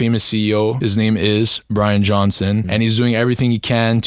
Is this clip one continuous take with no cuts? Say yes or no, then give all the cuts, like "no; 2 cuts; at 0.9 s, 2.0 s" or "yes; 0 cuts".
no; 2 cuts; at 0.8 s, 2.7 s